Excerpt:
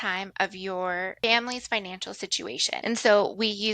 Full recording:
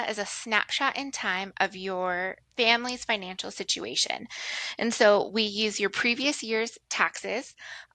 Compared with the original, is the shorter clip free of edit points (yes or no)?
no